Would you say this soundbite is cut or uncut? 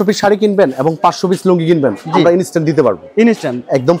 uncut